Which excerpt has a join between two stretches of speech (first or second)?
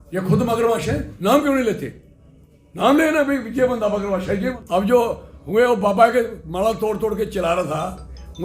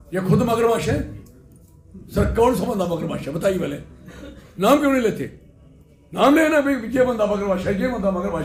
first